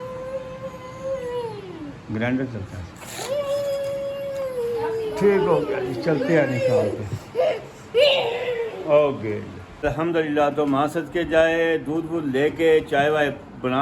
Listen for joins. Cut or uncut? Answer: cut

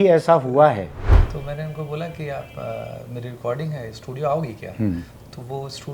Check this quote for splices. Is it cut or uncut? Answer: cut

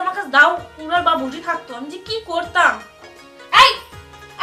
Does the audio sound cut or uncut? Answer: uncut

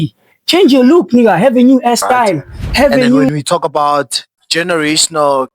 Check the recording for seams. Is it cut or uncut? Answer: cut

